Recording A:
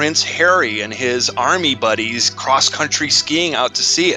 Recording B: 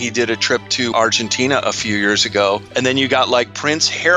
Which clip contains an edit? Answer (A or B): B